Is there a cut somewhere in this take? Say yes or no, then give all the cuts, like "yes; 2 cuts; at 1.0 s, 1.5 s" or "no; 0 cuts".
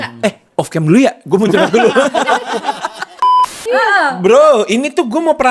yes; 1 cut; at 3.5 s